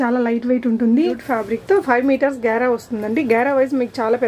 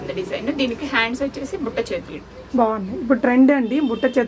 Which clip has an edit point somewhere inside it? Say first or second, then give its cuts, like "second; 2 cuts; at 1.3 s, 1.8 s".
first; 1 cut; at 1.2 s